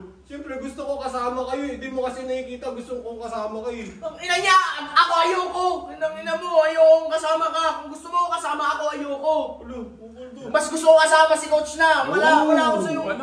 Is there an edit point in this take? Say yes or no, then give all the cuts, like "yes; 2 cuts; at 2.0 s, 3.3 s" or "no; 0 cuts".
no; 0 cuts